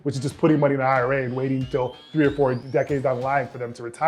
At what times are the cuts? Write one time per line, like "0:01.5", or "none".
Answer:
0:02.6